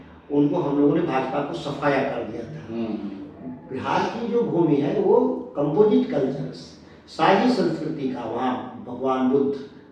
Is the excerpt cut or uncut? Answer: uncut